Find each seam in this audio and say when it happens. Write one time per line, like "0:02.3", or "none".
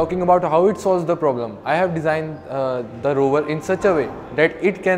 none